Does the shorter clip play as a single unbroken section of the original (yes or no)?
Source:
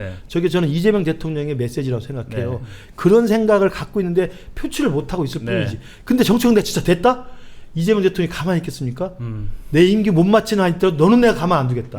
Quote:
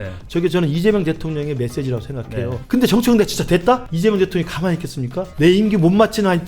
no